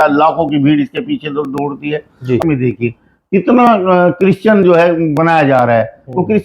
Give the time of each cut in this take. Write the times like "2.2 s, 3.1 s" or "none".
2.4 s